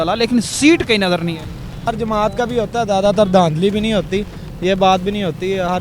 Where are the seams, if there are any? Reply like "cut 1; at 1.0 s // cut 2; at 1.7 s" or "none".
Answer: cut 1; at 1.8 s